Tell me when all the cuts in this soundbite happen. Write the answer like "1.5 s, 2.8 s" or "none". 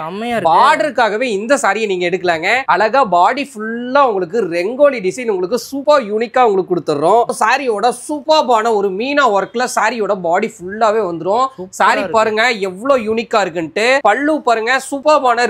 7.3 s, 14.0 s